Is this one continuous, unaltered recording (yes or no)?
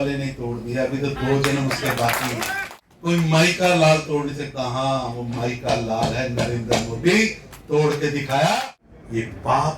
no